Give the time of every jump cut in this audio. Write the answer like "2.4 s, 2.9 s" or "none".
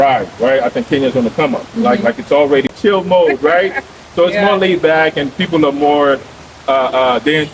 2.7 s